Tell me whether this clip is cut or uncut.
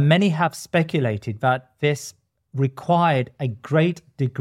uncut